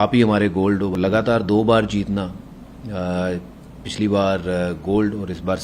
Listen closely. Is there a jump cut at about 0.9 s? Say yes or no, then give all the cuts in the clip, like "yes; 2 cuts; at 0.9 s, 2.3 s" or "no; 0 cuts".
yes; 1 cut; at 0.9 s